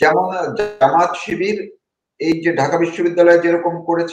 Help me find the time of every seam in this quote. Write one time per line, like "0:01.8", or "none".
none

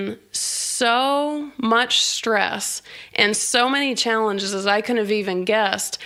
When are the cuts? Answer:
none

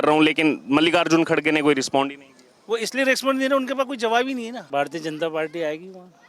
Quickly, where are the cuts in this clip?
0:04.6

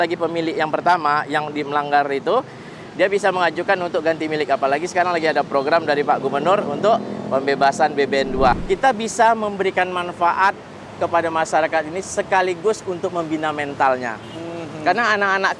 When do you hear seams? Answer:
0:08.5

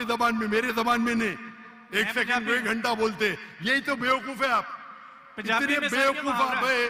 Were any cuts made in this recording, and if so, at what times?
none

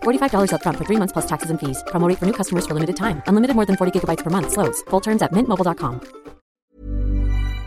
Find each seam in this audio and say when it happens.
0:06.5

